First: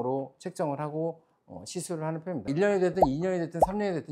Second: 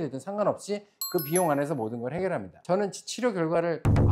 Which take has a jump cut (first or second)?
first